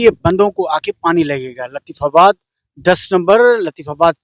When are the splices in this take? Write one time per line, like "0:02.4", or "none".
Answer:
none